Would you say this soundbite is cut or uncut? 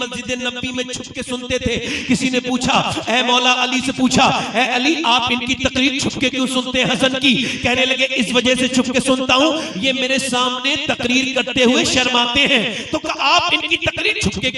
uncut